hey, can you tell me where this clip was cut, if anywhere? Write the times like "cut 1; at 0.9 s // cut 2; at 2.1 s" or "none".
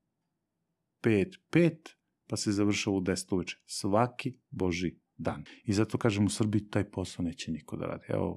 cut 1; at 5.5 s